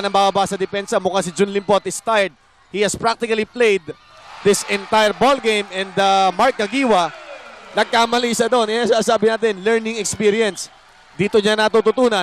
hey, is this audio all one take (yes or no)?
yes